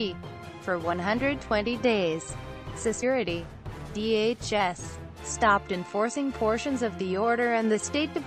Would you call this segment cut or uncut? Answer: uncut